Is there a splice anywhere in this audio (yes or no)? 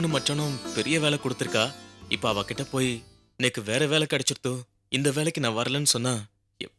no